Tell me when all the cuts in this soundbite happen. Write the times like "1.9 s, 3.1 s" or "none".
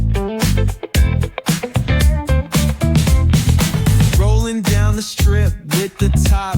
1.6 s